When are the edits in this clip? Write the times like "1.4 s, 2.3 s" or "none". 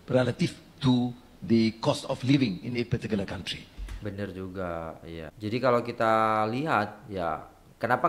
5.3 s